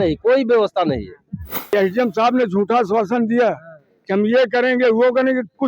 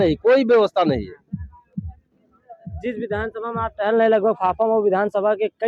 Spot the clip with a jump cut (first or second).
first